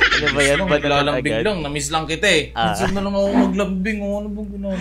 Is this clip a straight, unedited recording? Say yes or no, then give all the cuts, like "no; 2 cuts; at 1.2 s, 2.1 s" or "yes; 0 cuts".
no; 1 cut; at 2.6 s